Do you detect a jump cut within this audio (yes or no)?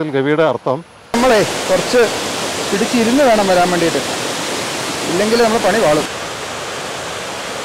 yes